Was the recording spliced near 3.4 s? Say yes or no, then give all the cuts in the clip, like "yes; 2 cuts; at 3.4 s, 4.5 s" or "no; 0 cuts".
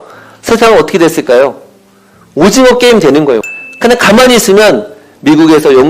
yes; 1 cut; at 3.4 s